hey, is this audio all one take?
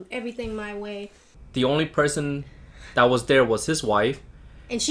no; 1 cut; at 1.3 s

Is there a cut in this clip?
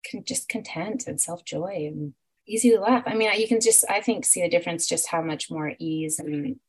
yes; 1 cut; at 2.3 s

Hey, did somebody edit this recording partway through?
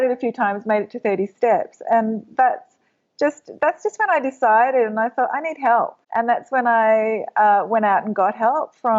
yes; 1 cut; at 6.0 s

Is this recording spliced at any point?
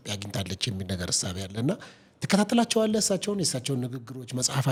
no; 0 cuts

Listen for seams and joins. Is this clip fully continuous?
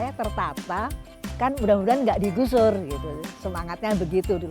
no; 1 cut; at 1.3 s

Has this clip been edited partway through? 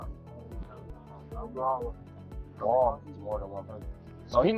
no; 0 cuts

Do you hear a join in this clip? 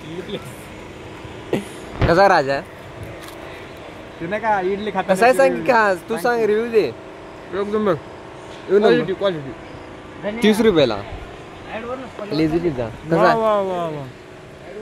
no; 0 cuts

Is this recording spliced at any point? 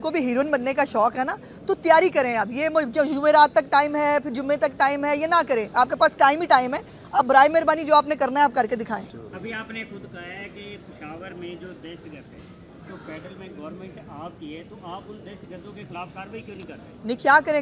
yes; 1 cut; at 9.1 s

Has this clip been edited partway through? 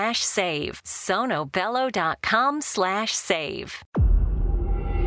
yes; 1 cut; at 3.8 s

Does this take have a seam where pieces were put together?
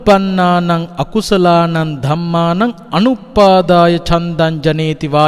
no; 0 cuts

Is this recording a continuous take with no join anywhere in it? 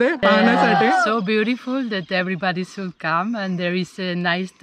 no; 1 cut; at 1.1 s

